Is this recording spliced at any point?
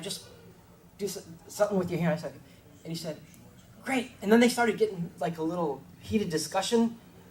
yes; 1 cut; at 4.5 s

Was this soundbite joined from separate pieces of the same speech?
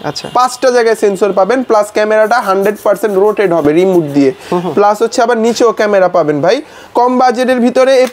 no; 0 cuts

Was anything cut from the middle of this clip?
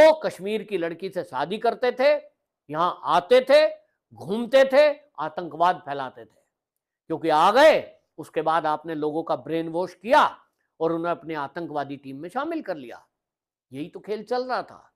no; 0 cuts

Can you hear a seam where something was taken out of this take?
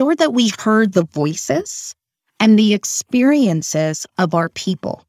no; 0 cuts

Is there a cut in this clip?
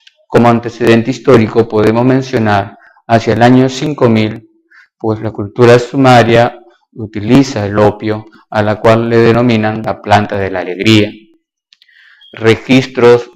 yes; 1 cut; at 11.0 s

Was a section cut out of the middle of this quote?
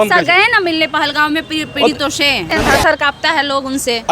yes; 1 cut; at 2.5 s

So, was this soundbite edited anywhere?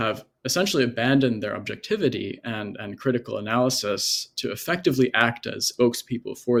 no; 0 cuts

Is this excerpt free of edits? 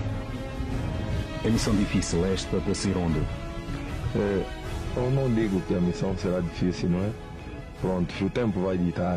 yes; 0 cuts

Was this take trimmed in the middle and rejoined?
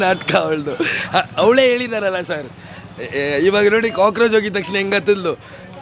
no; 0 cuts

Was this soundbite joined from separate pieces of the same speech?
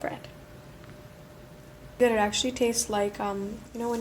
yes; 1 cut; at 2.0 s

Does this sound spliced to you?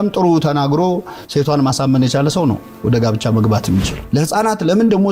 yes; 1 cut; at 4.0 s

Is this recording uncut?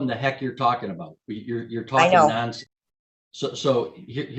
yes; 0 cuts

